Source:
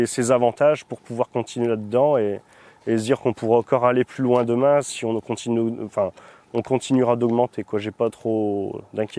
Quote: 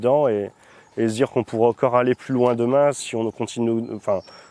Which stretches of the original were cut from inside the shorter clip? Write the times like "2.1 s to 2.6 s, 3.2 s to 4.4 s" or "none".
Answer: none